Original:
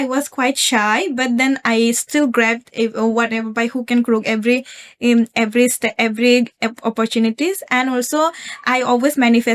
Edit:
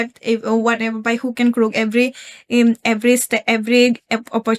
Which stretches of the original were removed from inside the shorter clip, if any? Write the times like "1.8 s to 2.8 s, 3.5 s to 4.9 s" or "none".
none